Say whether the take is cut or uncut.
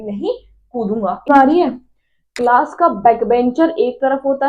cut